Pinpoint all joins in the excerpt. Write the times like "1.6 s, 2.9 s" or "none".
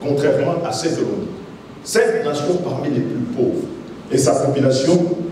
none